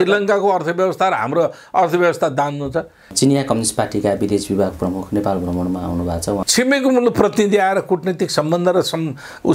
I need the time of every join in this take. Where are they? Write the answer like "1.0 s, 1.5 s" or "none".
3.1 s, 6.5 s